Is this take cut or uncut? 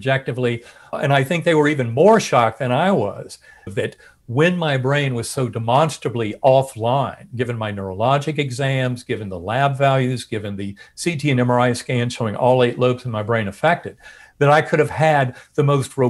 cut